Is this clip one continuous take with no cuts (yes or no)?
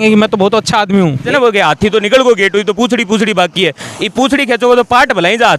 no